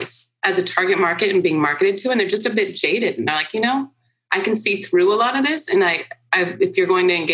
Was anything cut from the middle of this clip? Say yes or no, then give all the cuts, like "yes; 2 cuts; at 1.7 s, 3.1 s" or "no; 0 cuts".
no; 0 cuts